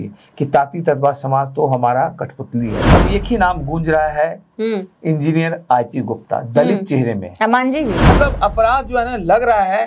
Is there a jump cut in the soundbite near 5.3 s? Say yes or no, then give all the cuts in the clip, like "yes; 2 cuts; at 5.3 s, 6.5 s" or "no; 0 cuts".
no; 2 cuts; at 2.9 s, 8.1 s